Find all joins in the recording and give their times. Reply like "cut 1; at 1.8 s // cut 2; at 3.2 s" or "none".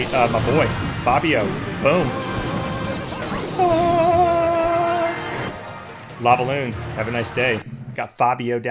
cut 1; at 5.5 s // cut 2; at 7.9 s